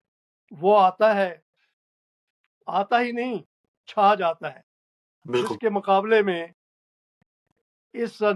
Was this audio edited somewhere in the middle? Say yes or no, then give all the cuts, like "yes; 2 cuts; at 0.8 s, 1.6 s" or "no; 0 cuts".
no; 0 cuts